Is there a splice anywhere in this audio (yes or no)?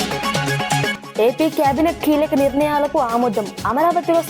yes